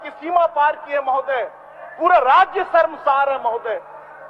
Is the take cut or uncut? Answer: uncut